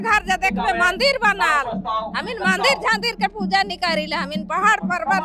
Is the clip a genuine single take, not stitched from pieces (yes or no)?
yes